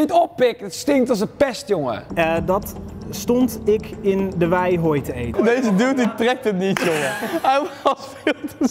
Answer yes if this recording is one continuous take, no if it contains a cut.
no